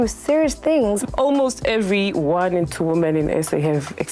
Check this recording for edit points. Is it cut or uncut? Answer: cut